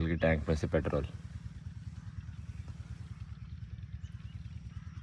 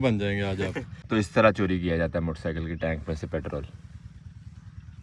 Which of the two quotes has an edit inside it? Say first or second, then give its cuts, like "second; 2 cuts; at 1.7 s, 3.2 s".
second; 1 cut; at 0.9 s